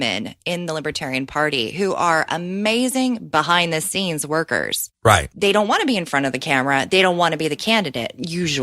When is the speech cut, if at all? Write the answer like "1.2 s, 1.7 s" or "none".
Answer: 5.3 s